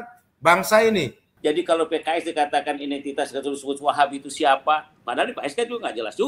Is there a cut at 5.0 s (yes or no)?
no